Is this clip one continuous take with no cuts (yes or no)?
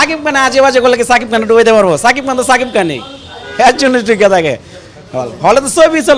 yes